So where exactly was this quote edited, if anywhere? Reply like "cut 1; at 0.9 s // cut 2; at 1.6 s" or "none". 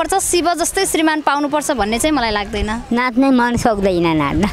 cut 1; at 2.8 s